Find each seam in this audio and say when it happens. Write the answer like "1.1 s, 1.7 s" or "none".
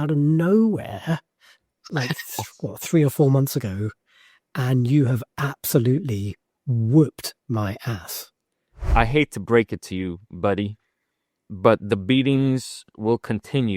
8.8 s